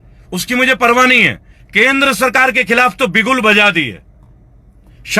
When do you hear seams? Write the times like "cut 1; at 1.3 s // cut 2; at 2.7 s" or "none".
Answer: cut 1; at 1.6 s